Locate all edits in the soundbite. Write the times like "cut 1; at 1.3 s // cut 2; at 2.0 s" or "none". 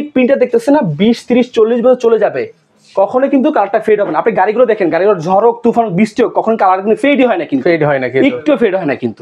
none